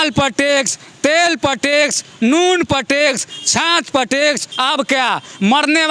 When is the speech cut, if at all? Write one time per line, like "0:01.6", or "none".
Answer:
0:04.5